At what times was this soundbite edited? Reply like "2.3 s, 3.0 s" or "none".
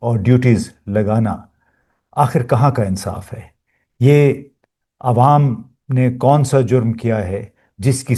none